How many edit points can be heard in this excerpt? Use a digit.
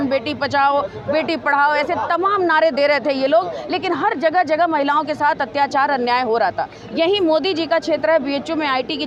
0